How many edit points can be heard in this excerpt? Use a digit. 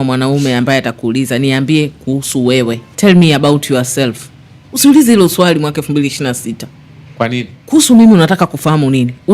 2